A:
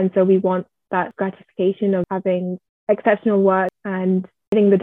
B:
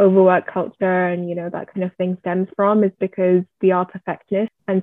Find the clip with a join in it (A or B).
A